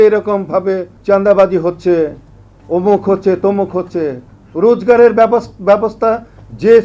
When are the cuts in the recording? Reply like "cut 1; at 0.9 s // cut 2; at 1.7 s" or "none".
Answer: cut 1; at 0.9 s